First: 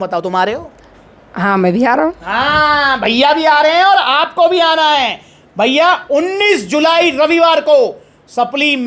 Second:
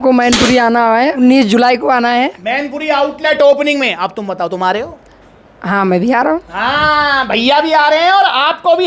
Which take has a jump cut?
second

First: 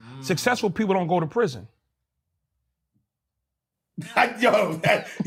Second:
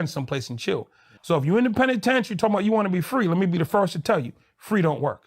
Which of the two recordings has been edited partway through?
second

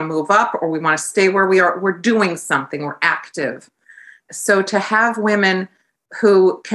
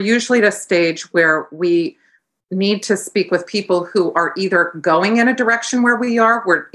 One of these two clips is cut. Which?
first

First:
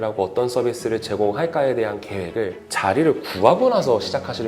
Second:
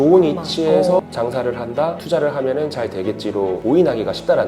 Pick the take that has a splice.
second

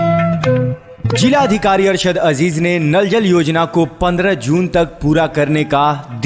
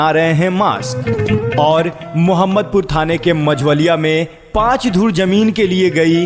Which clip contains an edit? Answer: first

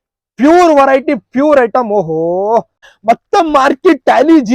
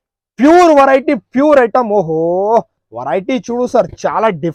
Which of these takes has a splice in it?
first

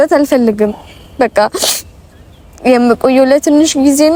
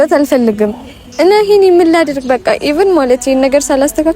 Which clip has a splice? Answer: second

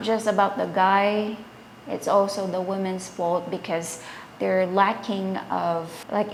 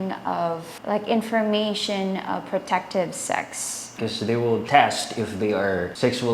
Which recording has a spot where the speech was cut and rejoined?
second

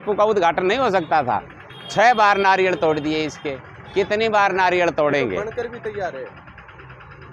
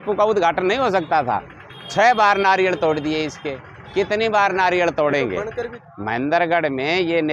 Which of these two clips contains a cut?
second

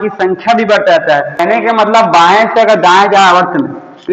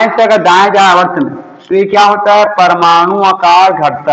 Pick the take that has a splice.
first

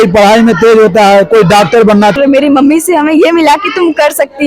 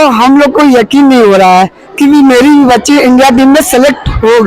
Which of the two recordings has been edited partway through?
first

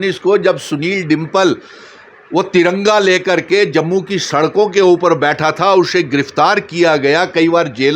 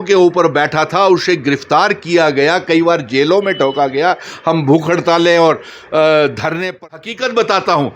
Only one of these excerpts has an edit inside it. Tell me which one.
second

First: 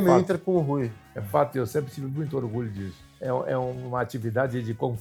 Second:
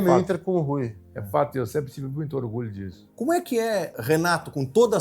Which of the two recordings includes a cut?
second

